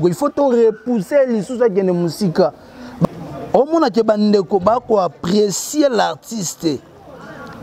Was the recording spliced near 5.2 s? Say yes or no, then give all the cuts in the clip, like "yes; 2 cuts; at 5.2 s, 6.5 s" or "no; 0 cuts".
no; 1 cut; at 3.0 s